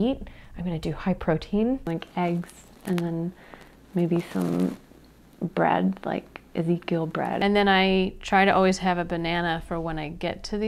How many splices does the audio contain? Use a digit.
2